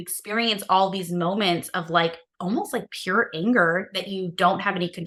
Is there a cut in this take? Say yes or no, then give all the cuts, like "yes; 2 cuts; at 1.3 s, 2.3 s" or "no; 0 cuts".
no; 0 cuts